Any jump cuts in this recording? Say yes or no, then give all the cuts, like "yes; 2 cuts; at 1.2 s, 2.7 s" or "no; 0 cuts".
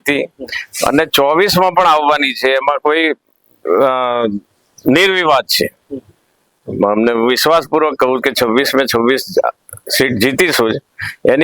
no; 0 cuts